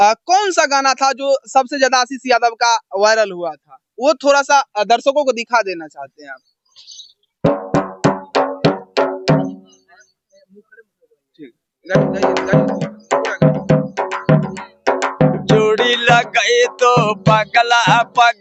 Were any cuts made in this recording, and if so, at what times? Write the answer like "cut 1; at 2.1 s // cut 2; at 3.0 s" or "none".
none